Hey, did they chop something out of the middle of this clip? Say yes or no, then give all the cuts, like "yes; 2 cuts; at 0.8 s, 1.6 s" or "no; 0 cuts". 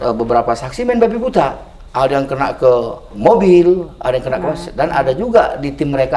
yes; 1 cut; at 3.1 s